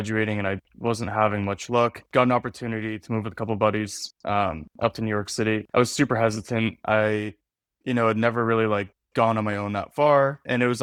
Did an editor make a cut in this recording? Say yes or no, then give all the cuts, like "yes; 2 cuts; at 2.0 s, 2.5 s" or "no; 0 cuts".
no; 0 cuts